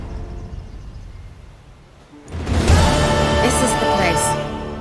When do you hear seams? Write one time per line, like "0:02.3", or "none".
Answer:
none